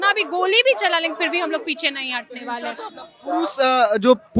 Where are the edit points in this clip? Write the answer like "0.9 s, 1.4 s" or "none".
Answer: 2.8 s